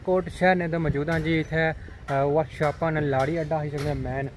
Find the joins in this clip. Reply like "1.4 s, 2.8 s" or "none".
none